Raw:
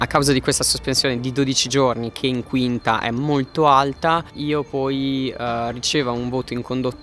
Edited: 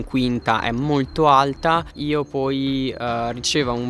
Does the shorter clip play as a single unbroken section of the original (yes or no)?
yes